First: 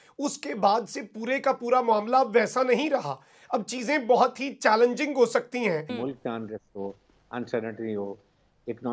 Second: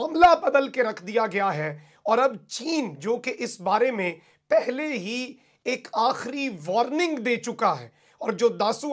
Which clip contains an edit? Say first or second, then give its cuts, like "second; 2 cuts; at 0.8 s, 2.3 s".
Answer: first; 1 cut; at 5.8 s